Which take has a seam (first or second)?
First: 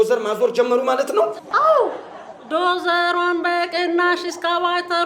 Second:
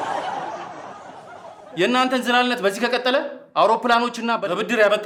first